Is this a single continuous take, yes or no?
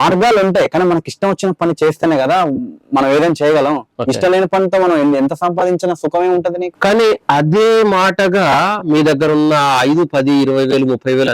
no